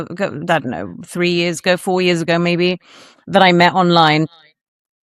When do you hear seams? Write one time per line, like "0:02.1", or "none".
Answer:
none